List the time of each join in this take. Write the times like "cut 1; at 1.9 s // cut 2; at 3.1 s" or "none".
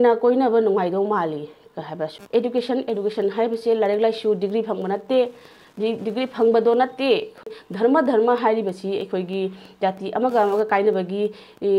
cut 1; at 2.1 s // cut 2; at 7.4 s